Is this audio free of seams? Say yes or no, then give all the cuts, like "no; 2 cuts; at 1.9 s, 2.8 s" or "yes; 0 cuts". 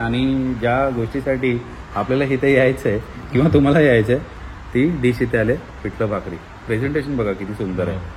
yes; 0 cuts